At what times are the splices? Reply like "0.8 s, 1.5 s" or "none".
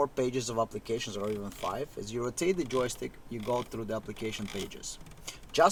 none